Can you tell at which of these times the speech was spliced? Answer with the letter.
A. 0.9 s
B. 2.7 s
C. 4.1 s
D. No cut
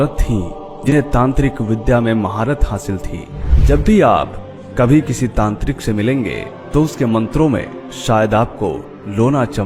A